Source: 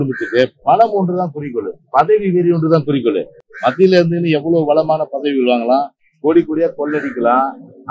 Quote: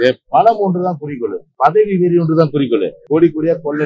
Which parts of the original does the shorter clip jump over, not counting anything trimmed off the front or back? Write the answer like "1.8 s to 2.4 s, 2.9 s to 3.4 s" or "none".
3.3 s to 6.1 s